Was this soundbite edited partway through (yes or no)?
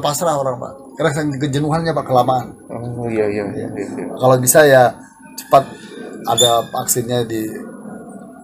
no